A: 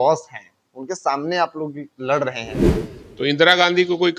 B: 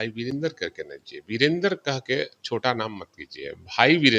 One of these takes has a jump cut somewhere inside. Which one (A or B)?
A